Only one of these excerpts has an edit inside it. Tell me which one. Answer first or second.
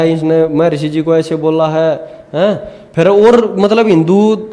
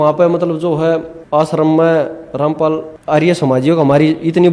second